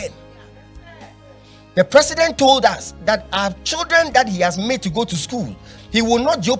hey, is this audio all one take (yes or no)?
yes